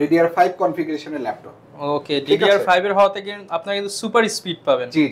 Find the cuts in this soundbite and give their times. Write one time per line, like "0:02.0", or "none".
none